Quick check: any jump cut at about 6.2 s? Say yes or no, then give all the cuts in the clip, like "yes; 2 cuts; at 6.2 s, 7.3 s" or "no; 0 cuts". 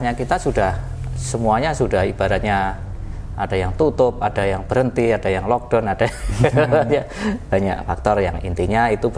no; 0 cuts